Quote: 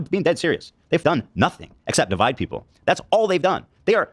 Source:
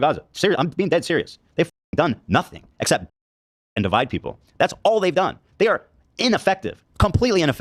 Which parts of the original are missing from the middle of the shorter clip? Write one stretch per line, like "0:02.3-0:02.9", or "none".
0:01.7-0:01.9
0:03.0-0:03.8